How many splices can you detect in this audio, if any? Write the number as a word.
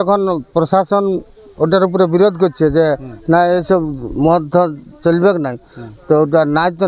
zero